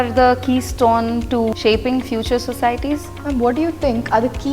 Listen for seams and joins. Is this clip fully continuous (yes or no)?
no